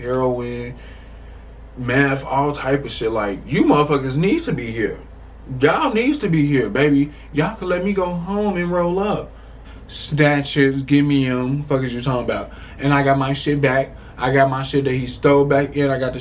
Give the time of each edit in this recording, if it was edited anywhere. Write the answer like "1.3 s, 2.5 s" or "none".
9.6 s